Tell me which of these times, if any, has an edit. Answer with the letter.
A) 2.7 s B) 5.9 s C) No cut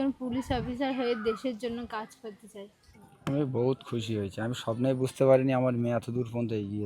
A